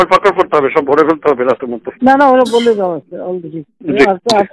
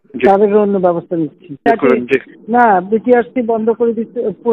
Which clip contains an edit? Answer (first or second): second